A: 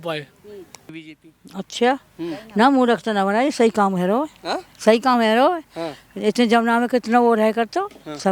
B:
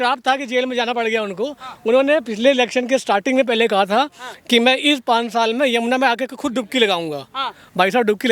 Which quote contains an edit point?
A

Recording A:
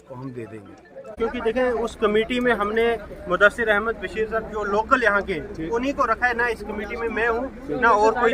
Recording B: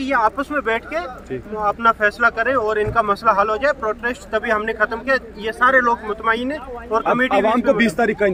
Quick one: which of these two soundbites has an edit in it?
A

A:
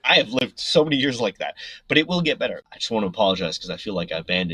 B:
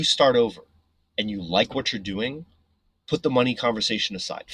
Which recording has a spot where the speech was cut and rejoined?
A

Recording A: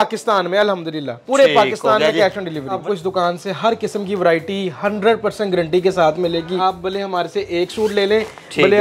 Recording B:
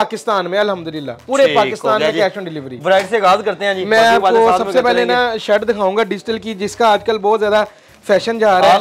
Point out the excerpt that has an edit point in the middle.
A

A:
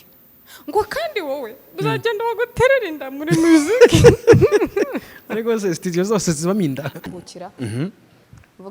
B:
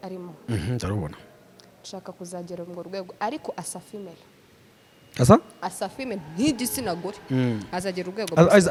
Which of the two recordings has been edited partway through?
A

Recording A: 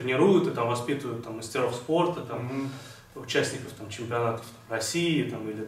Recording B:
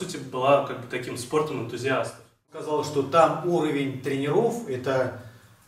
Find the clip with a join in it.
B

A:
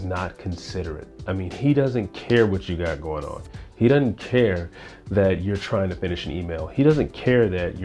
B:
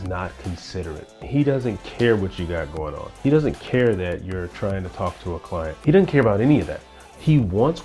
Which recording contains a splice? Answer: B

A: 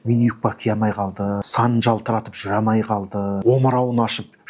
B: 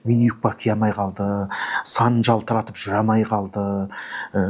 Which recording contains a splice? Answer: A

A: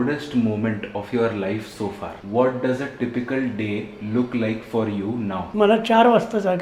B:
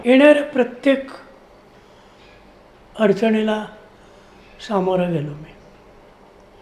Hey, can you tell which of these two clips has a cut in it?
A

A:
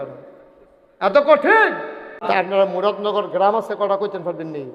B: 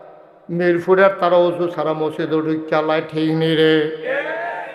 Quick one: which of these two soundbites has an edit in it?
A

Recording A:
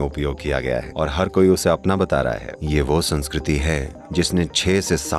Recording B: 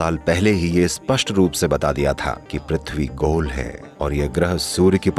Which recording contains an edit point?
A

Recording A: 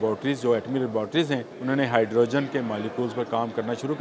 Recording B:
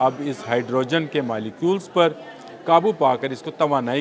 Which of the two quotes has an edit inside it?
A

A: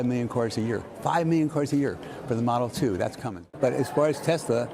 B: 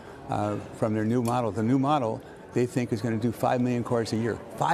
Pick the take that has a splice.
A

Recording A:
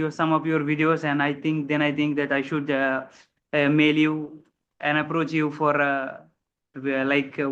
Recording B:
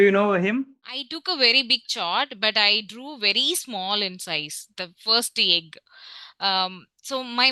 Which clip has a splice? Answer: B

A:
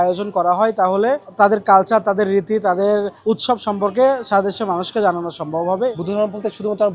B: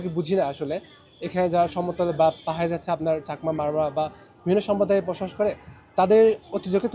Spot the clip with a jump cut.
A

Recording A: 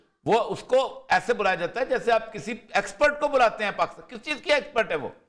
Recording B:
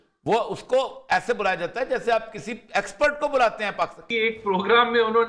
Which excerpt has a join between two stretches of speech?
B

